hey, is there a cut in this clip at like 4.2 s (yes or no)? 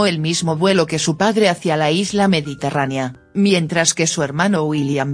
no